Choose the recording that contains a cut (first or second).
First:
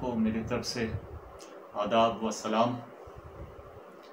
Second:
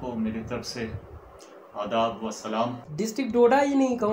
second